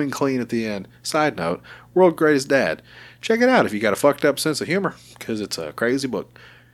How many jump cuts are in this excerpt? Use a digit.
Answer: 0